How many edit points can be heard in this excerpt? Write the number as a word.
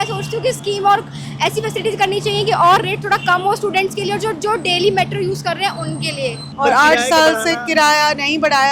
one